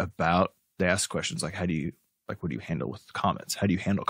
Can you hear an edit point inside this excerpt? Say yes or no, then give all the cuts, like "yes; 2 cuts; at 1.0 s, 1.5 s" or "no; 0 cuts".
no; 0 cuts